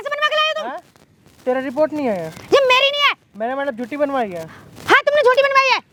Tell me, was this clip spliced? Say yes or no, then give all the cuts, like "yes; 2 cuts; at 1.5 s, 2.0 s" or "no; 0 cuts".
no; 0 cuts